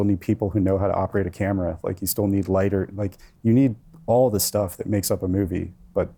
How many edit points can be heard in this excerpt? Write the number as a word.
zero